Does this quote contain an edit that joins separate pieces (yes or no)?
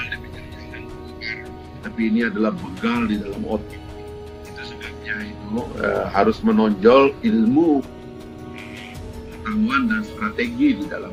no